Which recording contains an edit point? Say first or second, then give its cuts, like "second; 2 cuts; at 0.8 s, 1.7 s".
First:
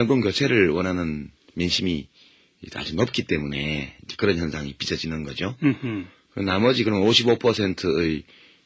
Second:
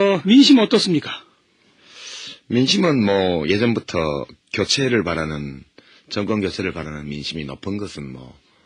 second; 1 cut; at 1.1 s